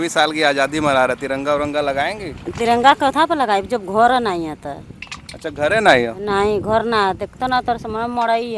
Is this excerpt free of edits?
yes; 0 cuts

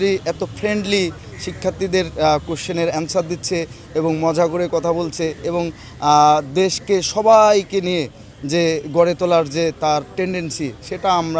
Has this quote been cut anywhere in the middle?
no; 0 cuts

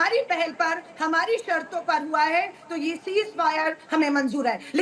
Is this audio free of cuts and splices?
yes; 0 cuts

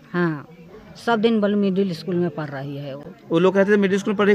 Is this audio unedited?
yes; 0 cuts

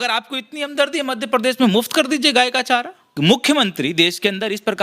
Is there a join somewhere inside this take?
yes; 1 cut; at 3.0 s

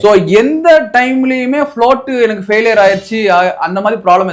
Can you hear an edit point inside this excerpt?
no; 0 cuts

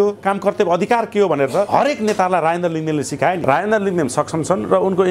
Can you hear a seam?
yes; 2 cuts; at 1.7 s, 3.4 s

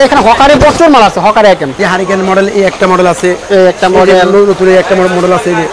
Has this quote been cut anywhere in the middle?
yes; 1 cut; at 1.8 s

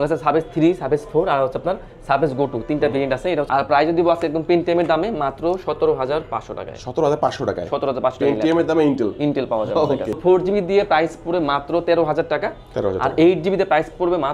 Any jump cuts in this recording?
yes; 2 cuts; at 3.4 s, 10.2 s

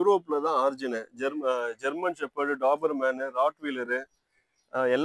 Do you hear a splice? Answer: no; 0 cuts

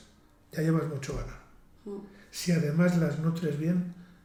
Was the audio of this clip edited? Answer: no; 0 cuts

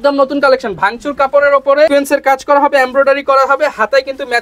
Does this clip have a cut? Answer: yes; 1 cut; at 1.9 s

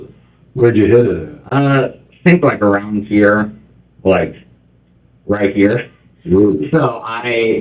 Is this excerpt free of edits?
yes; 0 cuts

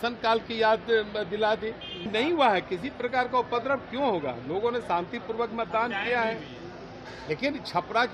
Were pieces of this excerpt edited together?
yes; 1 cut; at 2.1 s

